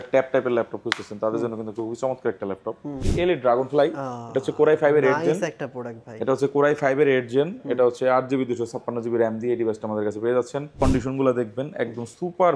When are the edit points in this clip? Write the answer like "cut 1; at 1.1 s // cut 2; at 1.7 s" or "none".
cut 1; at 3.0 s // cut 2; at 10.8 s